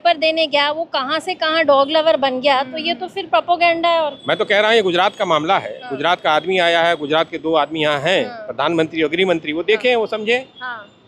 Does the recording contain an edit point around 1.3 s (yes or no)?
no